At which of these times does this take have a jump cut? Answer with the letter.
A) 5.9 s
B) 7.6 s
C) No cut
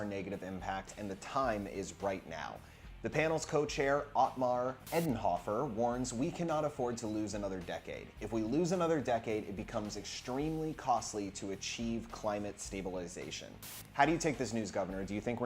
B